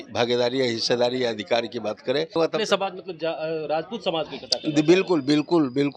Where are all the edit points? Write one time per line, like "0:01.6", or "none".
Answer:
0:02.4